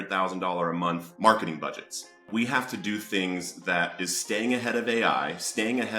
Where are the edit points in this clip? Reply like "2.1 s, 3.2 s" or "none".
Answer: 1.1 s, 2.3 s